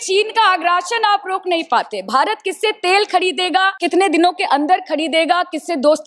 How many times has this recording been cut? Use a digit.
1